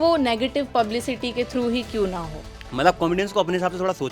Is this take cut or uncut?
cut